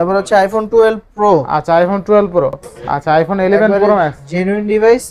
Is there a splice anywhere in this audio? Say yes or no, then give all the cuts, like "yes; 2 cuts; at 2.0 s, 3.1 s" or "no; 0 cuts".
yes; 1 cut; at 2.7 s